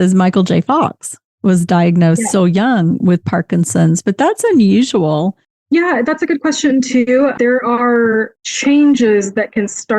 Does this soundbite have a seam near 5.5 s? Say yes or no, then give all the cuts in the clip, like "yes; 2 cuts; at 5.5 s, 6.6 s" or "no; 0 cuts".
yes; 1 cut; at 5.5 s